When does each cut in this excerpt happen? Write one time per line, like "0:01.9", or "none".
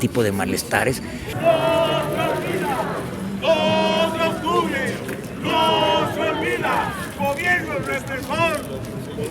0:01.3